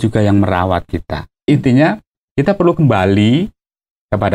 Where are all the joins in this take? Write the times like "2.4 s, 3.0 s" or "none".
1.5 s